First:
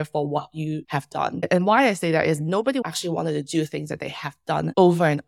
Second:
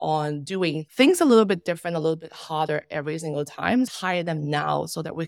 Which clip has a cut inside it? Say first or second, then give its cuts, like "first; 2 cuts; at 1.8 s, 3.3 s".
second; 1 cut; at 3.9 s